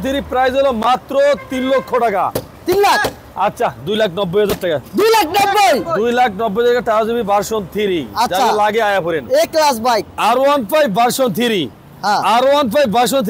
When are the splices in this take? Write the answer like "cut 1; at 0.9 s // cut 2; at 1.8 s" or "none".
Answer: none